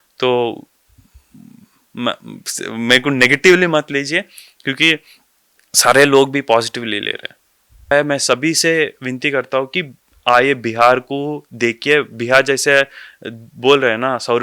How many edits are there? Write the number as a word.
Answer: one